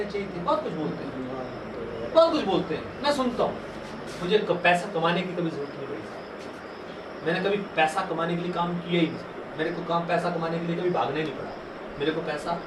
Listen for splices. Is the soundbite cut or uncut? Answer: cut